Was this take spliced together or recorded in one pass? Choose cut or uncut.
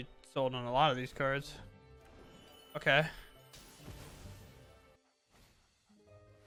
uncut